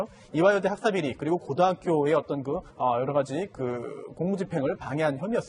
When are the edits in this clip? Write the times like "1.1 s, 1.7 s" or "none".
4.5 s